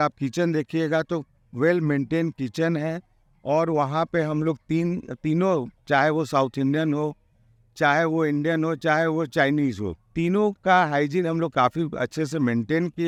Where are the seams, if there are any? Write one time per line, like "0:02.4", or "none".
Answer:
none